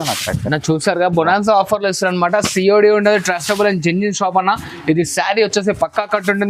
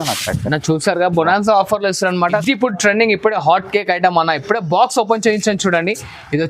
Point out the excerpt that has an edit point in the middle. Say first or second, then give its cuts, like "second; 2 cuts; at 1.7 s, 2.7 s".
second; 1 cut; at 2.4 s